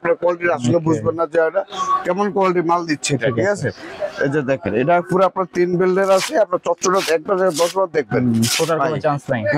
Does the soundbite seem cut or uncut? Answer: uncut